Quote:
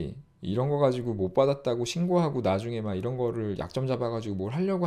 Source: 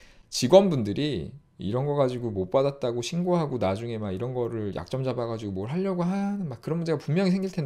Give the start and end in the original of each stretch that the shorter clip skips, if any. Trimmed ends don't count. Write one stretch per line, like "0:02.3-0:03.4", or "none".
none